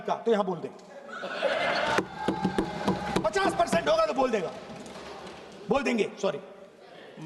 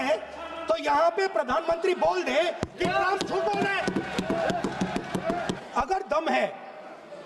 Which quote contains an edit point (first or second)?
second